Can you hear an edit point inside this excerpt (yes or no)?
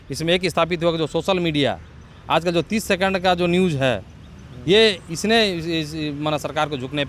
no